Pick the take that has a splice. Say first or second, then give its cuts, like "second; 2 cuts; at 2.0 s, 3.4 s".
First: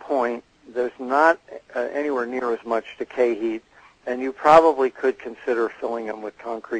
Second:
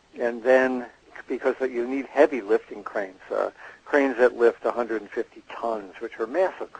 first; 1 cut; at 2.6 s